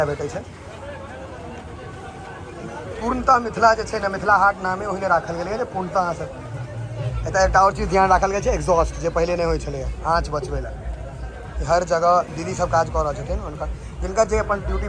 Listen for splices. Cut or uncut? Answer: uncut